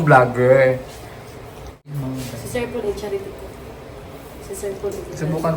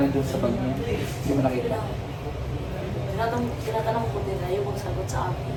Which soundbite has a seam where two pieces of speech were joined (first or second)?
first